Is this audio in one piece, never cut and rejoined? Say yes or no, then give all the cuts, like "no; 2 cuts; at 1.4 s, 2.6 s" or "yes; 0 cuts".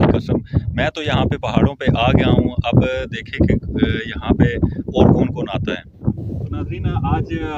no; 1 cut; at 6.2 s